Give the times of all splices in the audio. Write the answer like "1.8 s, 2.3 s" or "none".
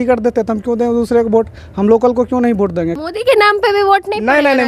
2.9 s